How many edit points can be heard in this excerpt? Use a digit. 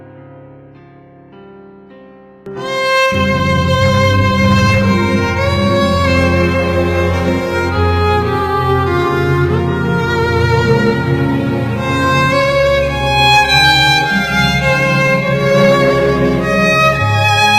0